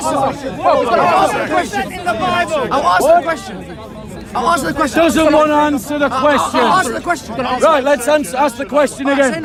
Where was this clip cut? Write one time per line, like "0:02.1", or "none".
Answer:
none